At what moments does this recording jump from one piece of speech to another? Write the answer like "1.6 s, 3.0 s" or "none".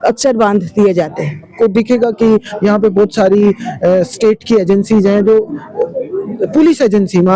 1.5 s

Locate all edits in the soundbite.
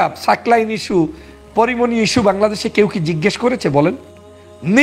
none

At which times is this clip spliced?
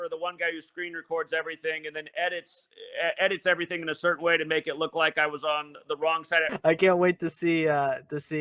1.9 s, 6.5 s

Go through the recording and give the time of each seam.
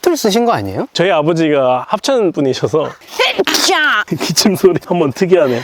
0.9 s, 1.8 s, 2.9 s, 4.1 s, 4.8 s

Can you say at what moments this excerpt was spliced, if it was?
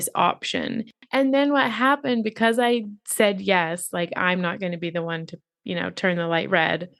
0.9 s

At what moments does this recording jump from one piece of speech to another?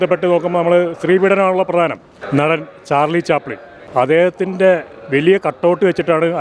2.2 s

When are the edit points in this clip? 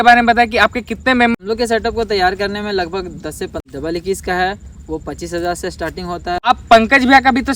1.3 s, 3.6 s, 6.4 s

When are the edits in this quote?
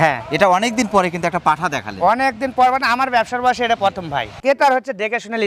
4.4 s

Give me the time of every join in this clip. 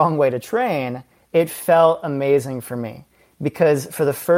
none

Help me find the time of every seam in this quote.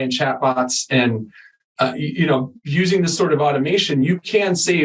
none

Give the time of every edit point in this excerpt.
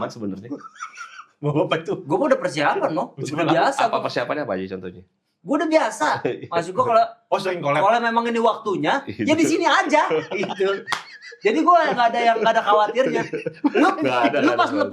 none

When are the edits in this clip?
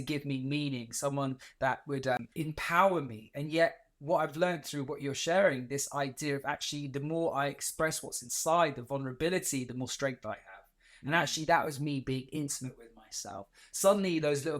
2.2 s

